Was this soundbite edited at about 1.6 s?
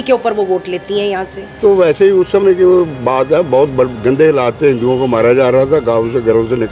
yes; 1 cut; at 1.6 s

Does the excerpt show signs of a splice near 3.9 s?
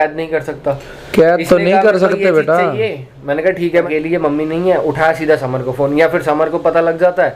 yes; 1 cut; at 3.9 s

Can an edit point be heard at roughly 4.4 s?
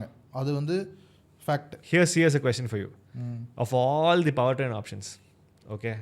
no; 1 cut; at 1.7 s

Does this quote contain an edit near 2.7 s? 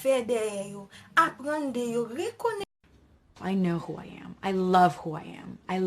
yes; 1 cut; at 2.7 s

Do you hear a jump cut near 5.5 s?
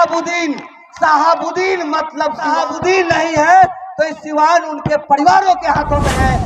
no; 1 cut; at 2.5 s

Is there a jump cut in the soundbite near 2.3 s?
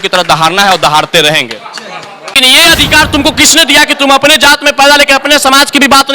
yes; 1 cut; at 2.3 s

